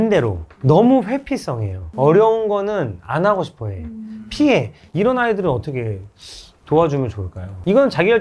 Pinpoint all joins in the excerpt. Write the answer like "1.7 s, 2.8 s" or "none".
4.8 s